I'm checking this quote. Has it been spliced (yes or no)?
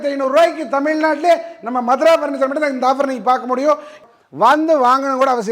yes